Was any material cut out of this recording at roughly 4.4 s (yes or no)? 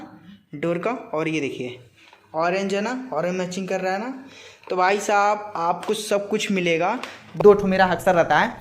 no